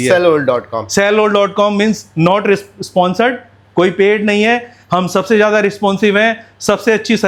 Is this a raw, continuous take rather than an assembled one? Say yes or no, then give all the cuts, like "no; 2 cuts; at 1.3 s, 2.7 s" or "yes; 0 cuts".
yes; 0 cuts